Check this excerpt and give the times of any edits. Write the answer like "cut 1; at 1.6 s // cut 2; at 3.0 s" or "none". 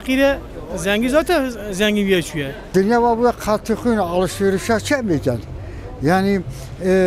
cut 1; at 2.6 s